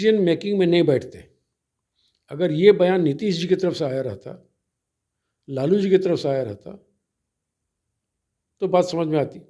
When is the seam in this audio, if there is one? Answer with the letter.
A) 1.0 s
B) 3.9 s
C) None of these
C